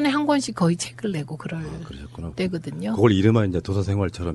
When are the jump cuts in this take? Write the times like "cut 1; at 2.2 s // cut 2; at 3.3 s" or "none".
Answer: none

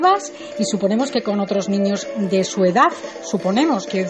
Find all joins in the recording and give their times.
cut 1; at 2.1 s

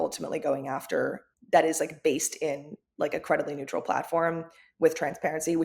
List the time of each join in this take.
cut 1; at 1.3 s

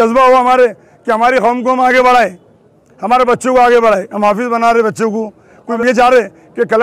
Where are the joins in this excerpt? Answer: cut 1; at 5.7 s

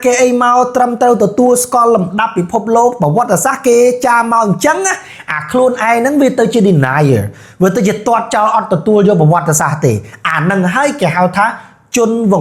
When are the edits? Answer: none

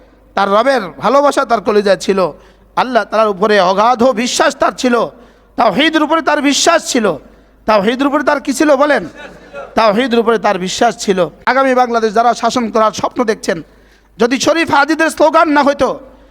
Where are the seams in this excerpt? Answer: cut 1; at 11.4 s

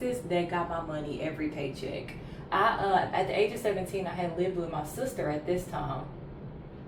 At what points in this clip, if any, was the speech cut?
none

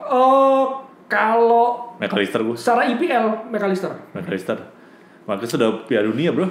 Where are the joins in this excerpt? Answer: none

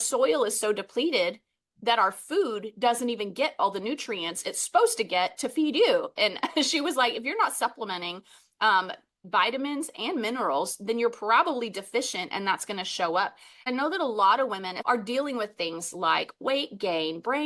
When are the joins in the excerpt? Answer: cut 1; at 13.6 s // cut 2; at 14.7 s

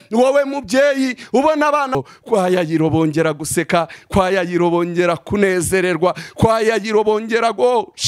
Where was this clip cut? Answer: cut 1; at 1.9 s

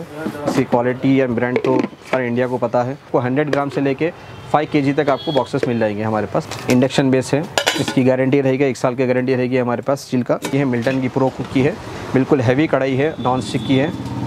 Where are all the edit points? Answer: cut 1; at 3.1 s // cut 2; at 6.4 s // cut 3; at 10.5 s

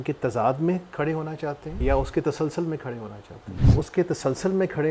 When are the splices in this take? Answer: cut 1; at 1.7 s // cut 2; at 3.7 s

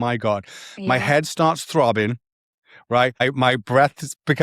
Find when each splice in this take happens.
cut 1; at 3.2 s

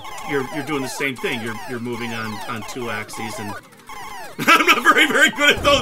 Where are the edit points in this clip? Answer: none

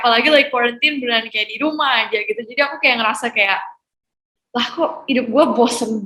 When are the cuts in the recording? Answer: none

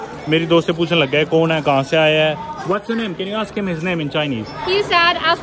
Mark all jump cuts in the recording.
cut 1; at 2.5 s // cut 2; at 4.5 s

